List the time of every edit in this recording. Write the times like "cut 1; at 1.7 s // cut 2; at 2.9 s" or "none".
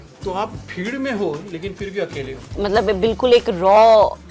cut 1; at 2.5 s